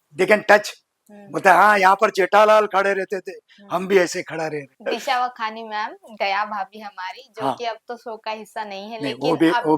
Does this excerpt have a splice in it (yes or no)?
yes